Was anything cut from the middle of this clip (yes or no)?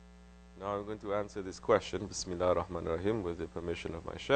no